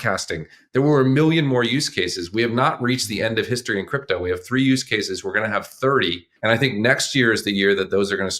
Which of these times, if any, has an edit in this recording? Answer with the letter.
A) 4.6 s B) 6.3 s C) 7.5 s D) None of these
B